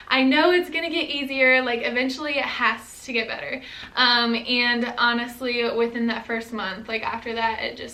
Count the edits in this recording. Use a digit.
0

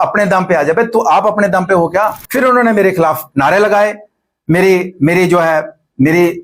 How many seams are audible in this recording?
1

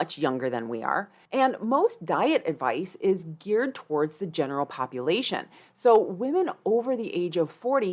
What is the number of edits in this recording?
1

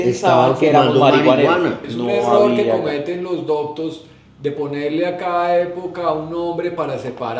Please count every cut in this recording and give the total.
1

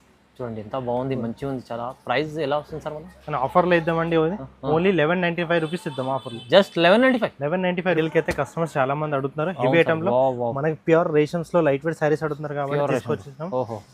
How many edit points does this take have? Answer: 1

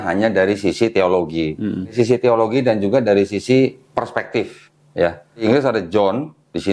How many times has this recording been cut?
2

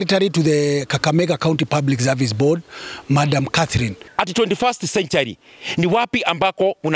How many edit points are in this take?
1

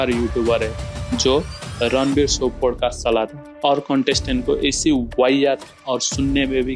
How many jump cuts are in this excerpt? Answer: 1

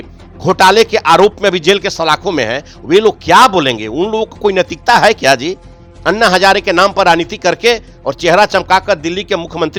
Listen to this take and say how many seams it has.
0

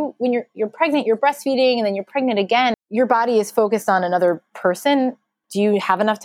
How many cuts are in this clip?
2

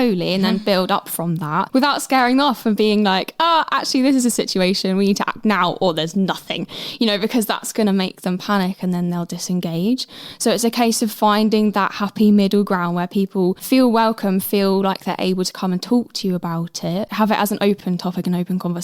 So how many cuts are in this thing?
3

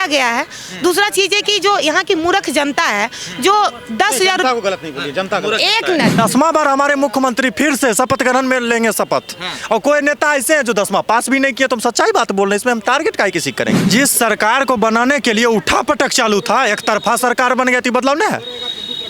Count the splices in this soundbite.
2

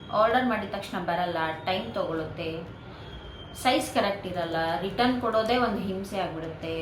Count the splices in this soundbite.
0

